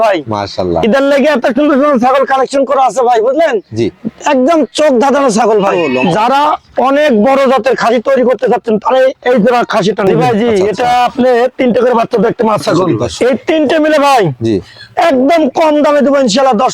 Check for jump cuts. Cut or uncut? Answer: cut